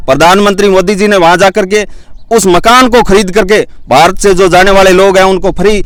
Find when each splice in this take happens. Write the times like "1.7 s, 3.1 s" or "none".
none